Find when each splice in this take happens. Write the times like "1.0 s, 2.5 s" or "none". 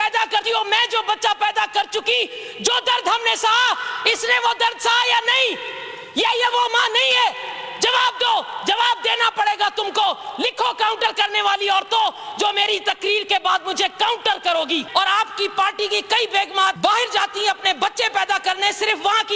14.8 s, 16.8 s